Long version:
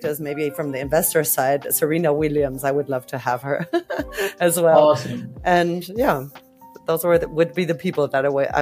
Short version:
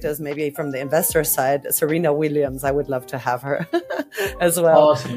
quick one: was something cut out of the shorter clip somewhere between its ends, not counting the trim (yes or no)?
no